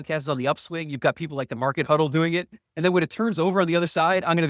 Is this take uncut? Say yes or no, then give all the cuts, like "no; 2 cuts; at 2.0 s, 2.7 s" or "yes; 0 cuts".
yes; 0 cuts